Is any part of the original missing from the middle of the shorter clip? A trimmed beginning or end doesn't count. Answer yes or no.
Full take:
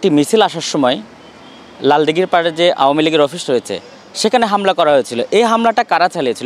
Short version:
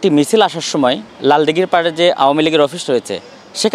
yes